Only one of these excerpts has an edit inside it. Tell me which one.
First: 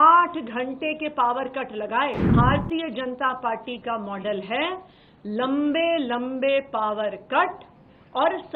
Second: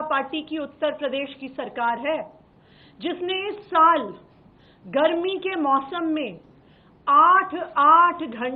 first; 1 cut; at 2.3 s

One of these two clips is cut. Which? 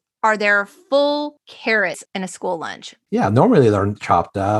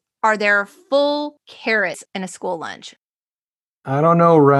second; 1 cut; at 3.2 s

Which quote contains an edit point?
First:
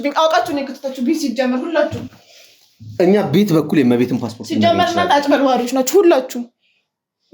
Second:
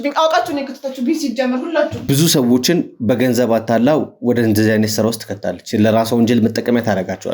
second; 1 cut; at 2.0 s

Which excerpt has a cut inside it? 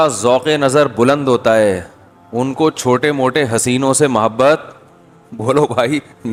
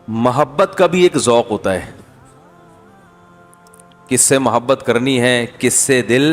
second; 2 cuts; at 2.1 s, 4.1 s

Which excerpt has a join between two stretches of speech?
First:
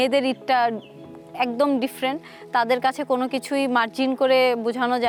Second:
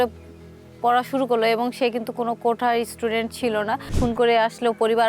second; 1 cut; at 3.9 s

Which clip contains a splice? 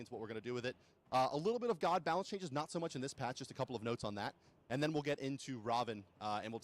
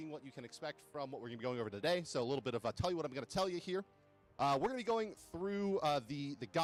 first; 1 cut; at 5.1 s

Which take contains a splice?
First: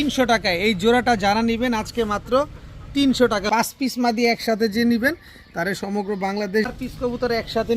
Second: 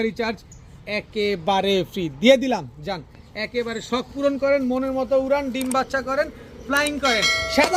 first; 2 cuts; at 3.4 s, 6.7 s

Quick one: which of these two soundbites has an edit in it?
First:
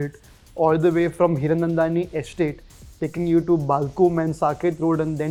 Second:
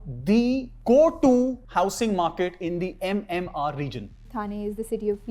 second; 2 cuts; at 1.6 s, 4.3 s

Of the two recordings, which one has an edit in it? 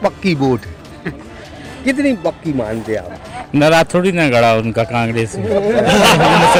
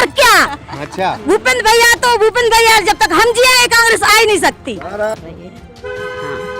second; 1 cut; at 5.1 s

